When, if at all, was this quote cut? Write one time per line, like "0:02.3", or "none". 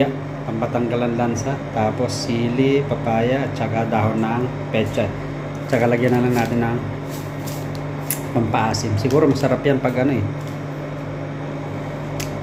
none